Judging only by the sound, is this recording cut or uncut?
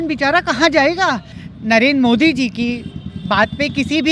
cut